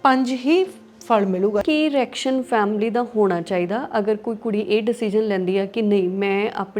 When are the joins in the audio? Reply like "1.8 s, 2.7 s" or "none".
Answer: 1.6 s